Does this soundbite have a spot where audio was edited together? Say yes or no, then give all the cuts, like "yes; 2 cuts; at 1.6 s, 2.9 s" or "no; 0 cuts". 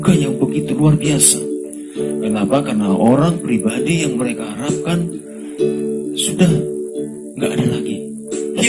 no; 0 cuts